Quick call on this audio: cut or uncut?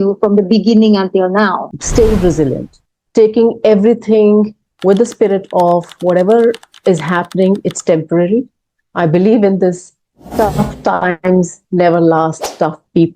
cut